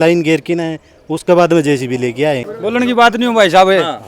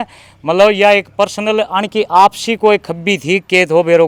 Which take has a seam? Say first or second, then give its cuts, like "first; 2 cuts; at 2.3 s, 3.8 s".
first; 1 cut; at 2.5 s